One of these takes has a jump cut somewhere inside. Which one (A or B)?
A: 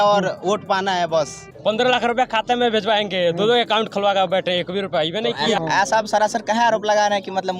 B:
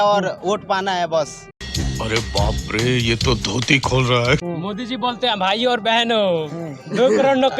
A